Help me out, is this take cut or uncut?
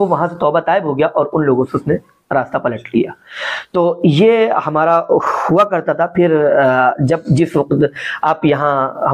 uncut